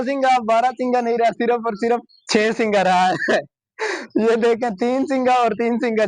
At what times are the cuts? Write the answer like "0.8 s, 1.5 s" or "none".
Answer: 3.4 s